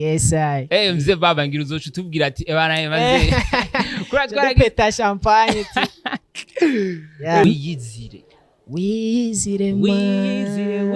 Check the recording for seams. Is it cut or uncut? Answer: cut